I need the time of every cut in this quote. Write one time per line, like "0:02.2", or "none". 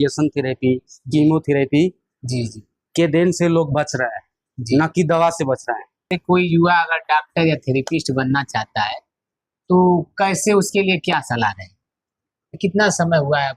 0:06.1
0:12.6